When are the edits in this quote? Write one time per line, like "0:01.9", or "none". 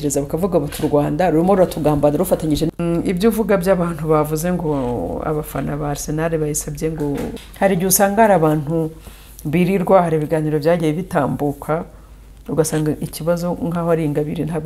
0:02.7
0:07.4